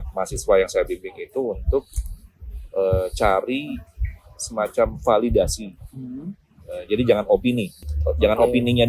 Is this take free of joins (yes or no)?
yes